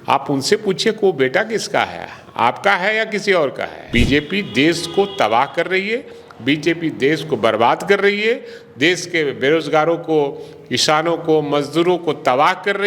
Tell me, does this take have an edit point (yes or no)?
yes